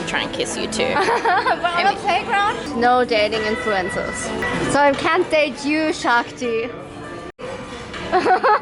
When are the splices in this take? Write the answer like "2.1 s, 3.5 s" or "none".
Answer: 2.7 s, 4.4 s, 7.5 s